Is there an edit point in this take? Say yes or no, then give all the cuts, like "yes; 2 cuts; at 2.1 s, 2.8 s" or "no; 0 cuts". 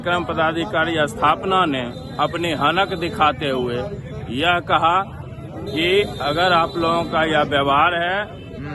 no; 0 cuts